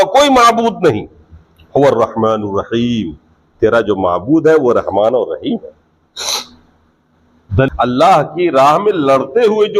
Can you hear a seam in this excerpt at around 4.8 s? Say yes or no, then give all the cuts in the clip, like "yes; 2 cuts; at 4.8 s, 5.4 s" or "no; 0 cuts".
no; 1 cut; at 7.7 s